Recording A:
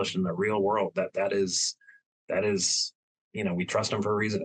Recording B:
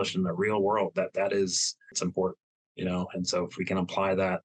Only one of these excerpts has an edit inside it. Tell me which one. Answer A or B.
B